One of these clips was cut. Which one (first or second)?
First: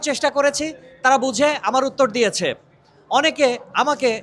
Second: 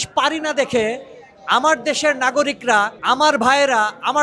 second